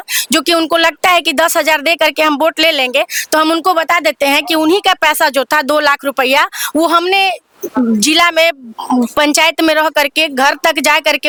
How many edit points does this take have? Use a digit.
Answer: 0